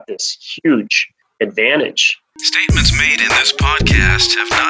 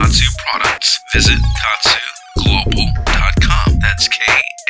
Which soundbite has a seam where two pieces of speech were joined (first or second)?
first